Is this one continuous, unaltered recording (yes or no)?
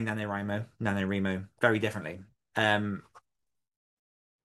no